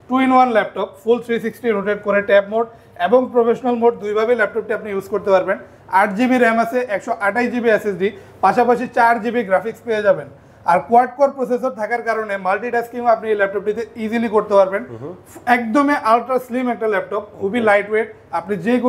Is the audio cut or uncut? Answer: uncut